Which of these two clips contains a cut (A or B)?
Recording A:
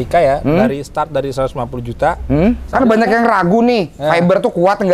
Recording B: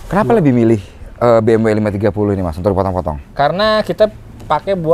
A